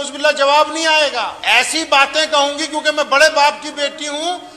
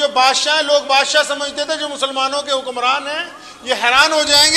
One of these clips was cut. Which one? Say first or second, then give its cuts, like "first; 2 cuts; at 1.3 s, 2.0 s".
first; 1 cut; at 1.4 s